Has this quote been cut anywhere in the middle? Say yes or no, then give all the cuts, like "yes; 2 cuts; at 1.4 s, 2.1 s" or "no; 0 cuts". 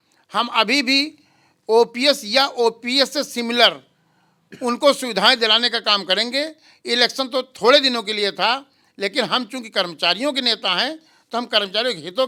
no; 0 cuts